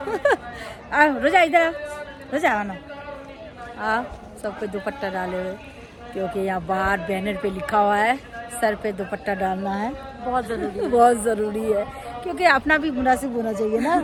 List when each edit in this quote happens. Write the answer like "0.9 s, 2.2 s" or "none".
none